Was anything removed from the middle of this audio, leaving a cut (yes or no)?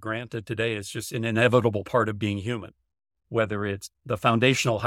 yes